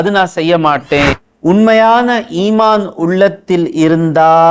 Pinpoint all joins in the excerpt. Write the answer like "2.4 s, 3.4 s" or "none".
1.2 s